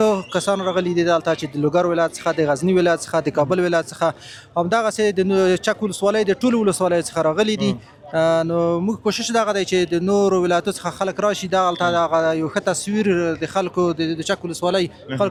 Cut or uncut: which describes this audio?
uncut